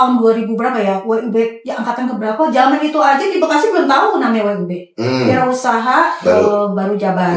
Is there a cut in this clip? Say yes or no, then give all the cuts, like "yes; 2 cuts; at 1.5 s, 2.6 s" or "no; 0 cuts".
no; 0 cuts